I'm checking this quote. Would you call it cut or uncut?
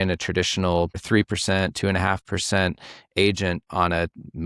cut